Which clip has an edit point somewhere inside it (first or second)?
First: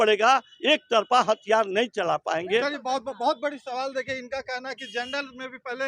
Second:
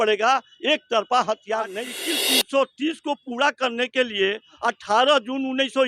second